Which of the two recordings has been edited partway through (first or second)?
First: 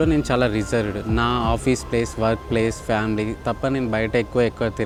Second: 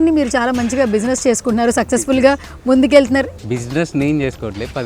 second